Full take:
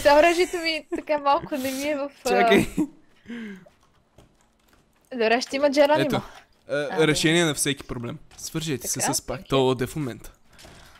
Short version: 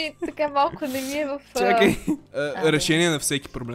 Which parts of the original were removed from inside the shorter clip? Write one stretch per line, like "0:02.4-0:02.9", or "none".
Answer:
0:03.0-0:06.6

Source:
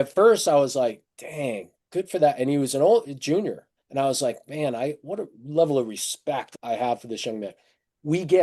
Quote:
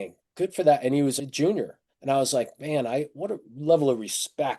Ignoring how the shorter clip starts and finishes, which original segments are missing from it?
0:02.7-0:03.1

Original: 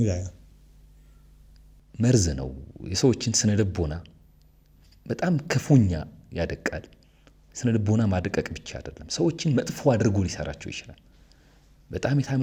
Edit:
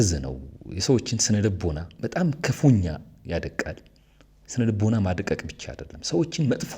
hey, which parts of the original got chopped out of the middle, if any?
0:04.0-0:05.0

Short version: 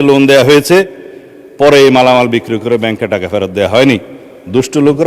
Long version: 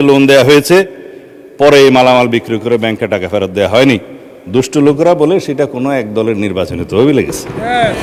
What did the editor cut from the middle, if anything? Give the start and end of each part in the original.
none

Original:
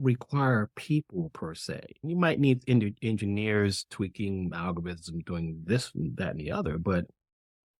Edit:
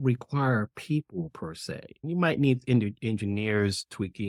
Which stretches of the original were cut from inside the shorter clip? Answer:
none

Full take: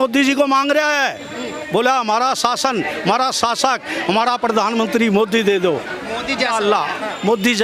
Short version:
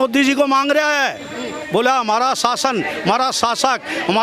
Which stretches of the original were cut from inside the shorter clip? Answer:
none

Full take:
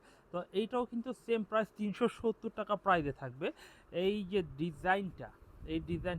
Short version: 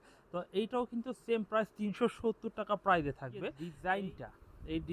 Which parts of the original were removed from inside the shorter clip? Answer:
0:03.7-0:04.7

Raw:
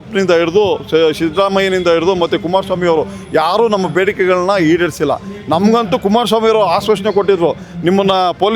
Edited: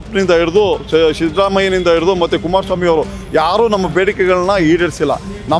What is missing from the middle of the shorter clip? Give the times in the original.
none

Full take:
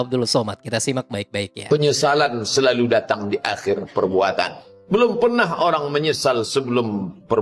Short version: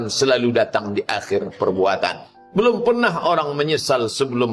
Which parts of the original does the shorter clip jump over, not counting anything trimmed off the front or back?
none

